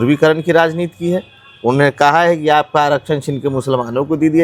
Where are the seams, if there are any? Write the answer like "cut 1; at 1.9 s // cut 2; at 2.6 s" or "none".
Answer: none